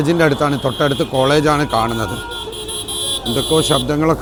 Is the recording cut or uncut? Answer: uncut